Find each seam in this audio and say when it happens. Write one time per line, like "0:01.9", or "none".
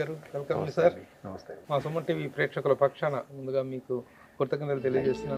0:01.5